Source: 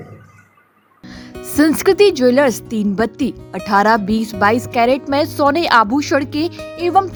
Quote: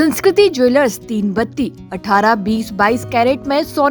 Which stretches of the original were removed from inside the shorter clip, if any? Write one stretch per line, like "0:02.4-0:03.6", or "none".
none